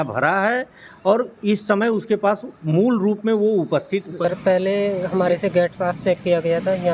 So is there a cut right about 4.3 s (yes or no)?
yes